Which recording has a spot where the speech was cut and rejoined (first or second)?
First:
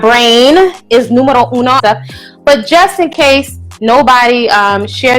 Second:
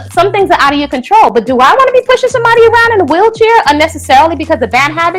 first